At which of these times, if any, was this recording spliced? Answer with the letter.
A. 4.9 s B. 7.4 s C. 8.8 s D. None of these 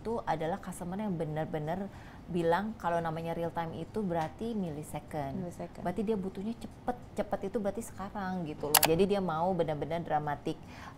C